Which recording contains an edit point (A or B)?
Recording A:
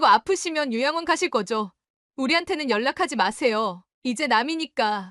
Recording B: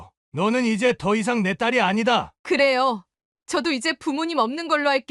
B